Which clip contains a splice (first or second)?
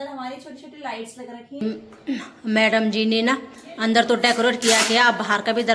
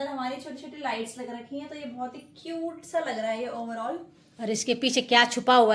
first